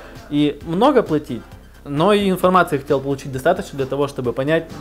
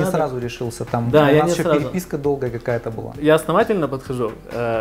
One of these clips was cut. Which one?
second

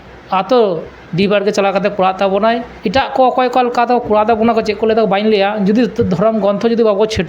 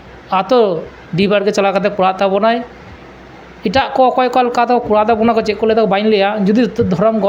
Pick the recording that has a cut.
first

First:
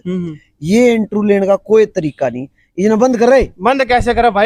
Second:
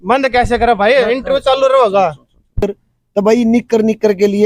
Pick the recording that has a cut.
second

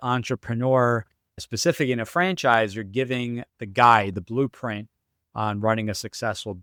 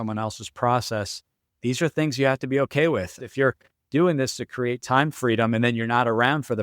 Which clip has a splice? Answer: second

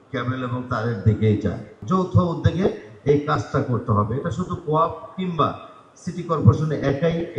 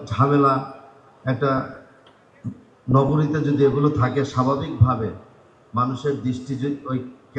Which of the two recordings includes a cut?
first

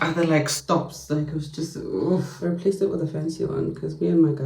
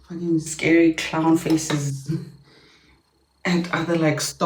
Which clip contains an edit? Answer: first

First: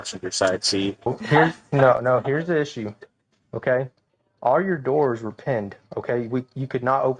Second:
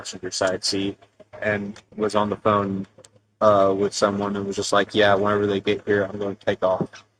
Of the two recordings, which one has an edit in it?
first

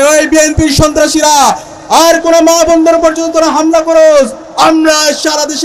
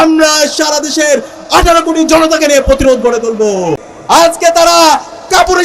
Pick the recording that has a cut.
second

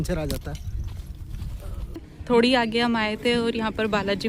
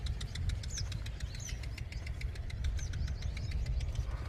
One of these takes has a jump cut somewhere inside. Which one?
first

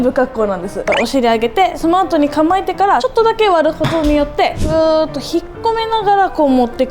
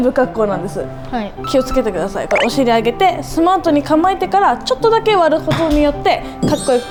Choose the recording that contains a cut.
first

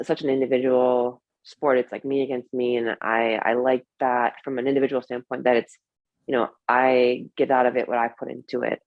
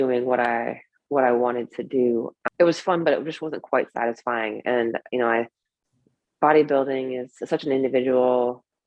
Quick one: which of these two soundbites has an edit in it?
second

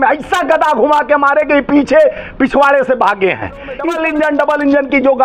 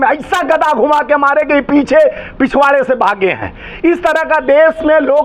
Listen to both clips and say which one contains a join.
first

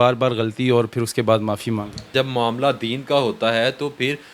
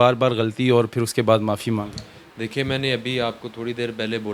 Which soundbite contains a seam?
first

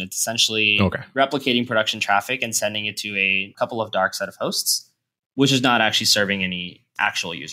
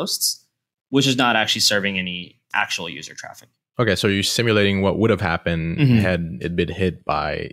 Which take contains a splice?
first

